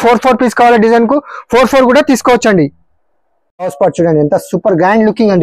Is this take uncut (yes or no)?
no